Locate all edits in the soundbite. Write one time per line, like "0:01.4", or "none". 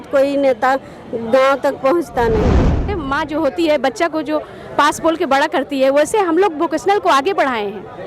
0:02.9